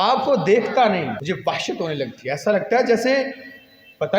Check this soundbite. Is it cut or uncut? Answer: cut